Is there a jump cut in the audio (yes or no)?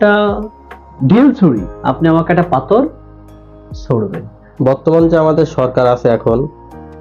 yes